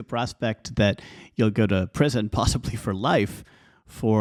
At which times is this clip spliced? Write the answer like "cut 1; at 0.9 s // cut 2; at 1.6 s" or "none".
none